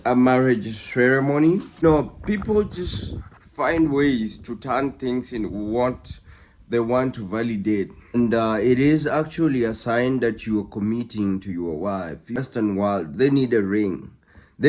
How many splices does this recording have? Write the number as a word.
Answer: three